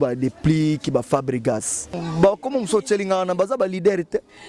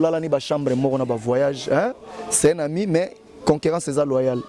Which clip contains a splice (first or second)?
first